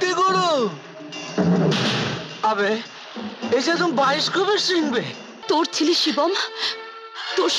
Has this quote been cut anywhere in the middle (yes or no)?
yes